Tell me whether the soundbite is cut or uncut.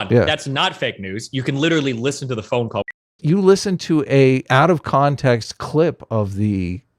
cut